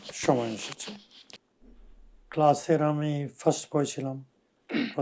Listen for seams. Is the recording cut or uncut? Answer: cut